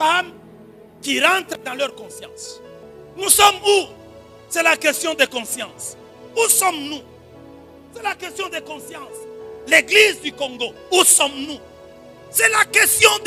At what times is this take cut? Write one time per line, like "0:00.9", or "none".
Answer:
0:03.3